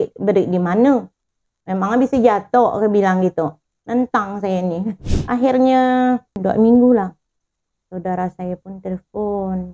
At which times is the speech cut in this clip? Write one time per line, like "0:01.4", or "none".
0:04.9
0:06.3